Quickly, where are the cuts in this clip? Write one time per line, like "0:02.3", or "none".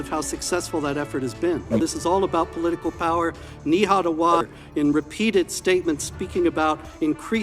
0:01.8
0:04.6